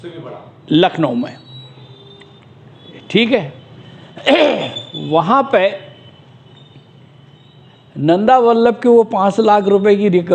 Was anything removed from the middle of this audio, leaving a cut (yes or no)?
no